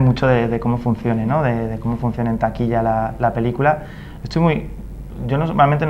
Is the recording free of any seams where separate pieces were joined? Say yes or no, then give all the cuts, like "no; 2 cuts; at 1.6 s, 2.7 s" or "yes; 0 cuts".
no; 1 cut; at 3.3 s